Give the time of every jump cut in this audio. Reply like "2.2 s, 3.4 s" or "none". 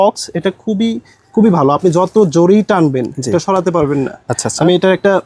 none